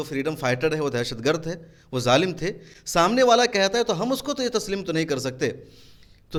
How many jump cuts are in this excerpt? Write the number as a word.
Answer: zero